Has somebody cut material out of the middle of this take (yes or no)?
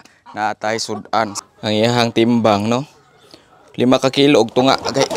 yes